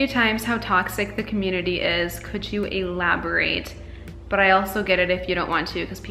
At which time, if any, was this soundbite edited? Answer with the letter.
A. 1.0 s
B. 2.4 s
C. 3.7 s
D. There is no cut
D